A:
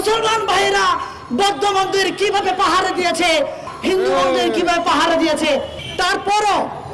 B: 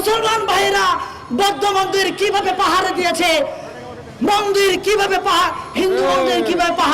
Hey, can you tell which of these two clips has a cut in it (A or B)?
A